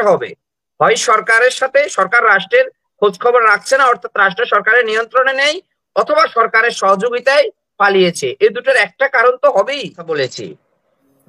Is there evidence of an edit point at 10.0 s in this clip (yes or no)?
yes